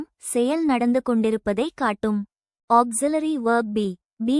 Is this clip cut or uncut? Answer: cut